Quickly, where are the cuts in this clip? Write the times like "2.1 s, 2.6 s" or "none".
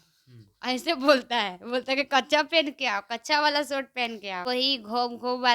4.5 s